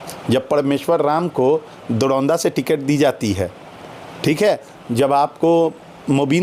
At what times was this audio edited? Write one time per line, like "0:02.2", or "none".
none